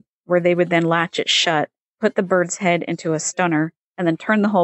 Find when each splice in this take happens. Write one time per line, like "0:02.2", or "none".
0:01.8